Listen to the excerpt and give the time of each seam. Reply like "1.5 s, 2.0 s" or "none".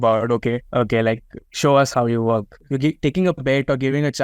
2.6 s